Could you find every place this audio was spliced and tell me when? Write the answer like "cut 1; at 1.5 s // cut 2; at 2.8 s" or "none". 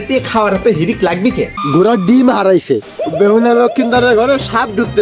cut 1; at 1.6 s

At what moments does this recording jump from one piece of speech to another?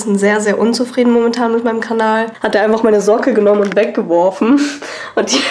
cut 1; at 2.4 s

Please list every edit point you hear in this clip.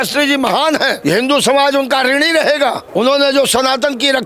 cut 1; at 1.0 s // cut 2; at 2.8 s

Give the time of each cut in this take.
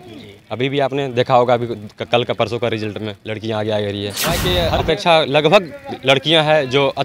cut 1; at 4.5 s

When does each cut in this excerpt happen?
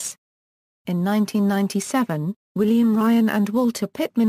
none

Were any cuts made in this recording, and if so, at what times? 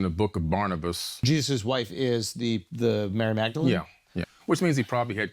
cut 1; at 1.1 s // cut 2; at 4.3 s

